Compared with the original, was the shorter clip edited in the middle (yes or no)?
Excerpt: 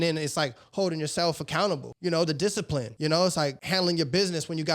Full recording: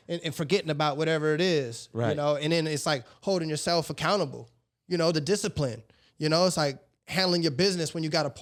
yes